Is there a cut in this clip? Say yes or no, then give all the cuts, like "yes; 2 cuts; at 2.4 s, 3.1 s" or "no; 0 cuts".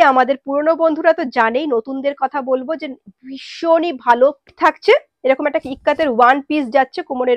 yes; 1 cut; at 4.5 s